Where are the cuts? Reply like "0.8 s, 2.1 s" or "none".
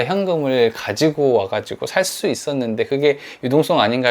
none